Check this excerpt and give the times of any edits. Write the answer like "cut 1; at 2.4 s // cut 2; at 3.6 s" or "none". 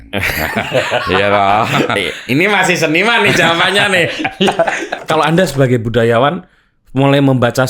cut 1; at 5.0 s